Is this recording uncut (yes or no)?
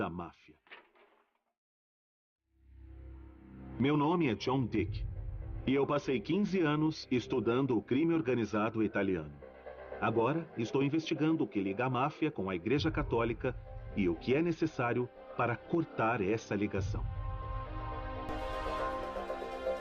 no